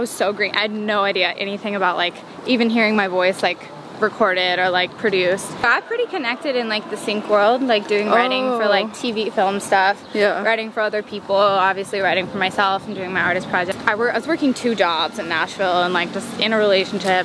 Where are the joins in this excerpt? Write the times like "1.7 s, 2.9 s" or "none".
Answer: 5.6 s, 13.7 s